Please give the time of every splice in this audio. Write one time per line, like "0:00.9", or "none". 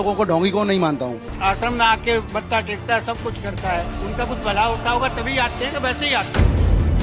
none